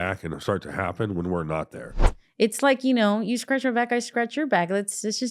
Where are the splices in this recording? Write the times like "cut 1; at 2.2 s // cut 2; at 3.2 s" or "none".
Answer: cut 1; at 2.1 s